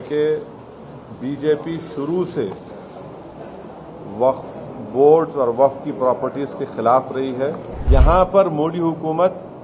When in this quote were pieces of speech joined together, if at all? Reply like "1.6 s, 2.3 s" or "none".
7.7 s